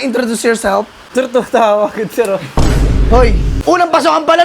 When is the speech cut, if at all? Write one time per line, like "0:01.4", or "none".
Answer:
0:01.0
0:03.5